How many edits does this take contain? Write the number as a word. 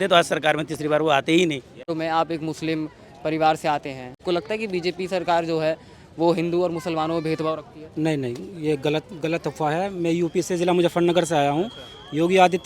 two